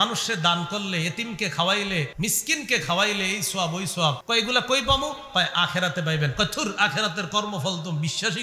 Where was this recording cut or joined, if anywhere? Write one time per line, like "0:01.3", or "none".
0:02.1
0:04.2

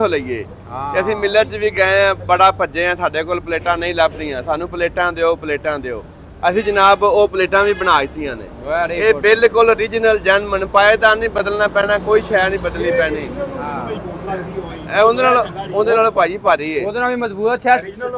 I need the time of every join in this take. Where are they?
none

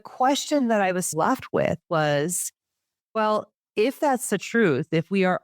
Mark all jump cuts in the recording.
0:01.1

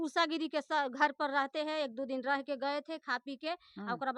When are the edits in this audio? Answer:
none

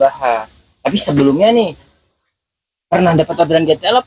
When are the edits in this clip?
none

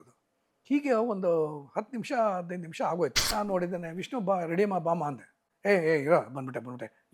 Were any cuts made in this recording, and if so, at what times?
0:03.2

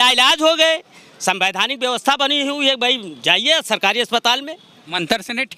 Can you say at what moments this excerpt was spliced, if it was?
none

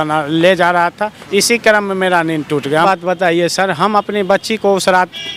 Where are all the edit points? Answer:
0:02.8

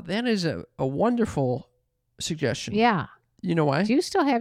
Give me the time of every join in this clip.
none

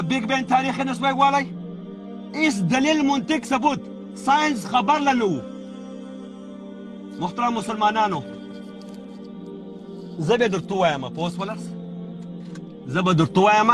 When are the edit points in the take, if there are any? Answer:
0:08.3
0:09.8
0:11.5
0:12.9

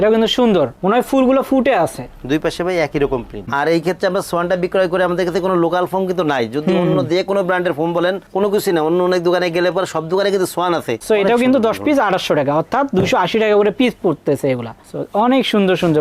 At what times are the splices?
0:03.5
0:10.9

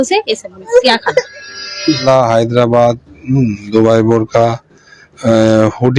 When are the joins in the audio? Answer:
0:02.0

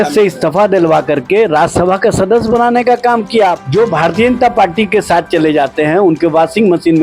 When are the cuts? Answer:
0:03.6

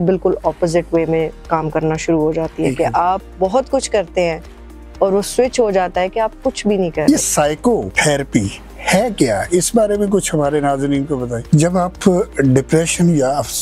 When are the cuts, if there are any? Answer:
0:07.0
0:11.4

